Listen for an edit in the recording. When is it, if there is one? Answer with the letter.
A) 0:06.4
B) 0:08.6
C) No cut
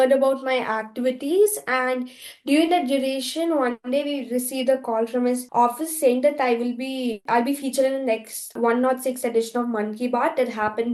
C